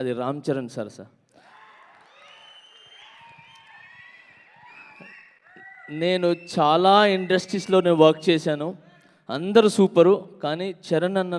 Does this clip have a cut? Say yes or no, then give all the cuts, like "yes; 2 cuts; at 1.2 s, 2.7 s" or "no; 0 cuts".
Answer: no; 0 cuts